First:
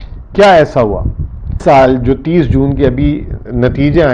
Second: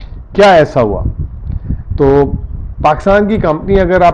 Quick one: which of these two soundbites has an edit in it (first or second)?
first